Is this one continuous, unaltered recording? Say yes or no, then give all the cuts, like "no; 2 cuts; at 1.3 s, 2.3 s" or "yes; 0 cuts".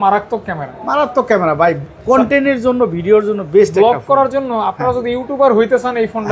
yes; 0 cuts